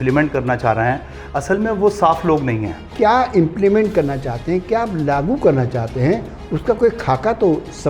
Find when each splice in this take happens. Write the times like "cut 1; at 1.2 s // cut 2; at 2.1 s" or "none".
cut 1; at 2.9 s